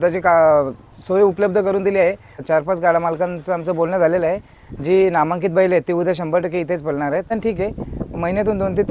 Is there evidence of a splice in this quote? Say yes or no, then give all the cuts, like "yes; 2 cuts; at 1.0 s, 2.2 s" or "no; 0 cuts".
yes; 2 cuts; at 2.4 s, 7.3 s